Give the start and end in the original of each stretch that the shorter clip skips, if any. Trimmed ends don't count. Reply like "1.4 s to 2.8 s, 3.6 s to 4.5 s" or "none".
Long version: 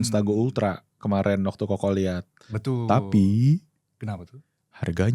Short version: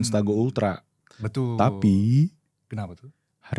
0.9 s to 2.2 s